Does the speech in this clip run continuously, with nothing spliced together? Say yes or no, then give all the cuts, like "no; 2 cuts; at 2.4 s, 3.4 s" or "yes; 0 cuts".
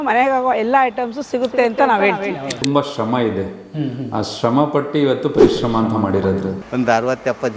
no; 2 cuts; at 2.6 s, 6.6 s